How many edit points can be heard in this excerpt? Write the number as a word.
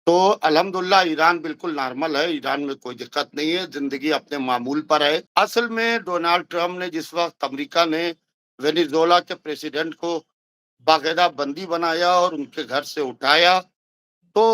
one